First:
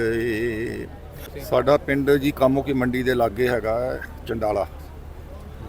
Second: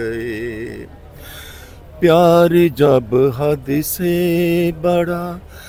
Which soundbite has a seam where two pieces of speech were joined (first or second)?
first